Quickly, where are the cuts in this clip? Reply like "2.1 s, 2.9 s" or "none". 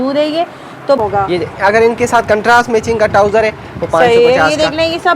1.0 s